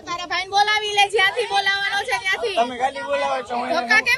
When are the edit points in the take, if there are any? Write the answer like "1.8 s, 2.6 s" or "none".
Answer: none